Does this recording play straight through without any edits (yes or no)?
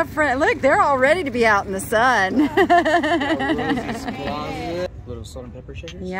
no